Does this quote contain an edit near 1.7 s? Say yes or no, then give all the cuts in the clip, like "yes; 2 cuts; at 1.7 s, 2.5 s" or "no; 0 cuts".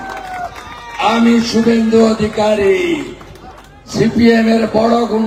no; 0 cuts